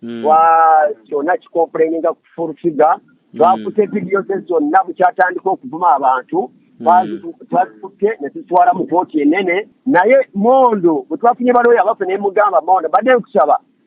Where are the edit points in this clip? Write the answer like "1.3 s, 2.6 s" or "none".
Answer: 9.7 s